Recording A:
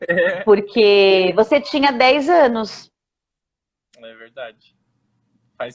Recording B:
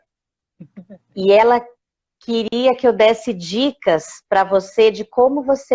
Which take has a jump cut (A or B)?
B